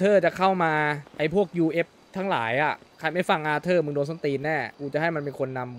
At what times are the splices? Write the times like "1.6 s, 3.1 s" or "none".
1.0 s, 2.9 s, 4.8 s